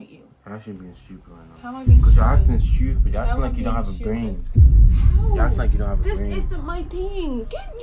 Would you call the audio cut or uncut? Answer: uncut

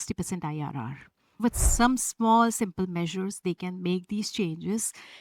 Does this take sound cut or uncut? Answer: cut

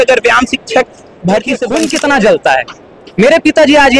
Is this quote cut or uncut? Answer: cut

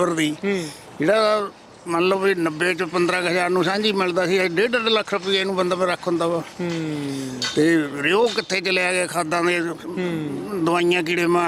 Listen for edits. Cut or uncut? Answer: uncut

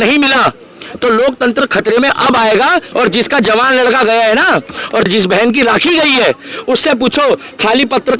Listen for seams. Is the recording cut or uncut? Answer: cut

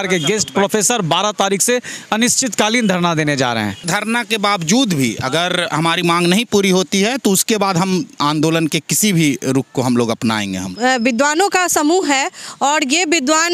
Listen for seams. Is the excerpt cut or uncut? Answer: cut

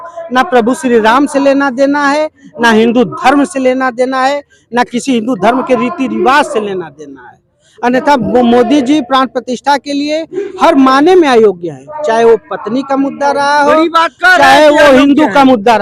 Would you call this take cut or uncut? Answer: uncut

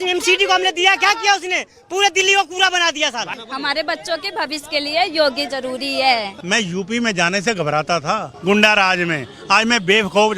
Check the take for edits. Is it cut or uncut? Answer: cut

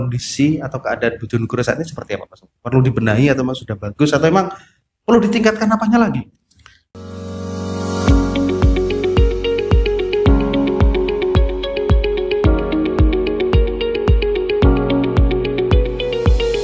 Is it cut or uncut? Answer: uncut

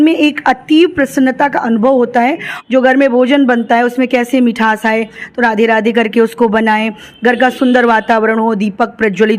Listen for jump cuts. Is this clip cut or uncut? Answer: cut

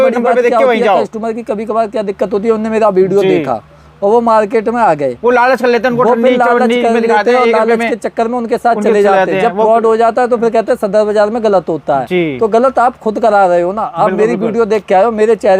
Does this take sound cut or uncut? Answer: uncut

